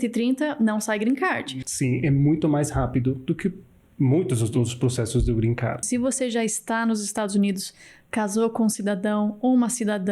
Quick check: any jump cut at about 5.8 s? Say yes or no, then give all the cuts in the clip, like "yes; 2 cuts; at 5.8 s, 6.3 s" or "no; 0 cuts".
yes; 2 cuts; at 1.4 s, 5.8 s